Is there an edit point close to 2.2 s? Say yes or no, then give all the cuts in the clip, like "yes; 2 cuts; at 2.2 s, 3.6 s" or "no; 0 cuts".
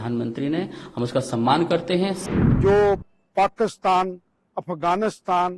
yes; 1 cut; at 2.2 s